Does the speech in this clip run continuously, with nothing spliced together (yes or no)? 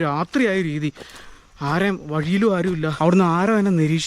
no